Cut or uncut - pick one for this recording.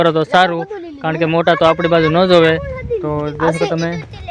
uncut